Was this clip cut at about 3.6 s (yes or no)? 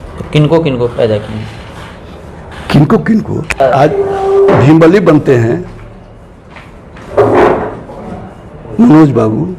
yes